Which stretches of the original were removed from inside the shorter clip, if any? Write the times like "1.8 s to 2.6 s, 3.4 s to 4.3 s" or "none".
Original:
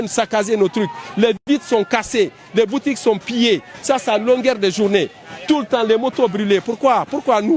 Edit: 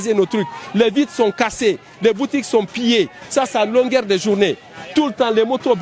1.4 s to 1.5 s